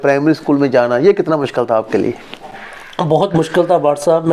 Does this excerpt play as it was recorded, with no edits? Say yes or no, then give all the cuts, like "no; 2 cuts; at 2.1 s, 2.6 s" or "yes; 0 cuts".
yes; 0 cuts